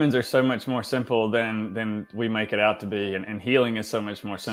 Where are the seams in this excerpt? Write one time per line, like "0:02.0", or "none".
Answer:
none